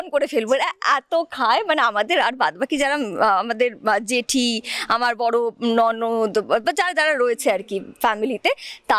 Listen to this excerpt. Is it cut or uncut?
uncut